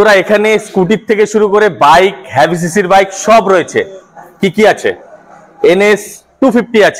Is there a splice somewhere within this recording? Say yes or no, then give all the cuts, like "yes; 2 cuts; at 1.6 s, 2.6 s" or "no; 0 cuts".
no; 0 cuts